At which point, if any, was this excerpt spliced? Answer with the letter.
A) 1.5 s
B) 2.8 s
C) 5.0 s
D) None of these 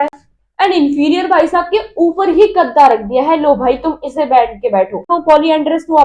C